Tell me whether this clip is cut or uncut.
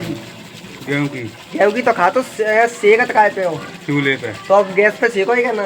uncut